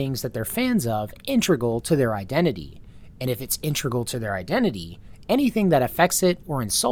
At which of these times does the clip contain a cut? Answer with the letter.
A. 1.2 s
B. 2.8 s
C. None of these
C